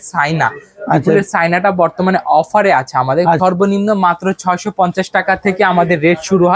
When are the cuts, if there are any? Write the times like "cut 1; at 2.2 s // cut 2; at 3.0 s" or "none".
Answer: cut 1; at 3.4 s